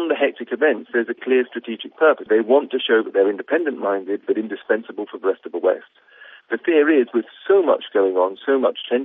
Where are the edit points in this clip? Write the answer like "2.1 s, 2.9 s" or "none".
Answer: 2.2 s